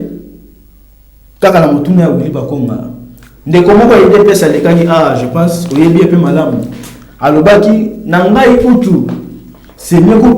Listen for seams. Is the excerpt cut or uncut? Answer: uncut